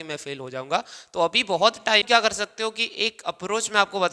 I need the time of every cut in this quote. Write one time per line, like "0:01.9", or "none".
0:02.0